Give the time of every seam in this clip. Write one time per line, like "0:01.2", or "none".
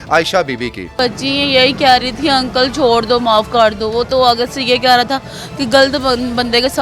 0:00.9